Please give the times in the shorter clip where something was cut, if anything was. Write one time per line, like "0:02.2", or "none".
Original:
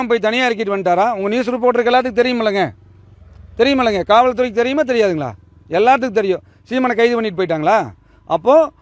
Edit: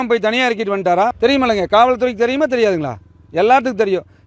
0:01.1